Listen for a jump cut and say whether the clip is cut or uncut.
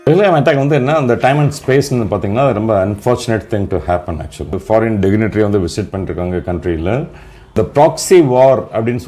cut